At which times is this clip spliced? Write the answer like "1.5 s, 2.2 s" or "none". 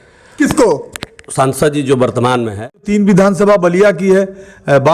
2.8 s

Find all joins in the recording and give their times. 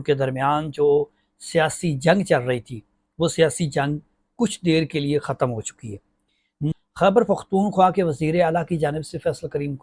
6.6 s

